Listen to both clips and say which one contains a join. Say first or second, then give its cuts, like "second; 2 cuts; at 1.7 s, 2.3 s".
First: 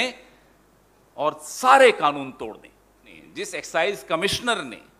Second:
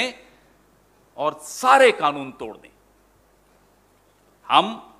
first; 1 cut; at 3.2 s